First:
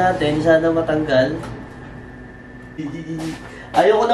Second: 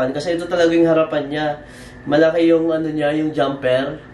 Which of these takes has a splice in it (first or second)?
first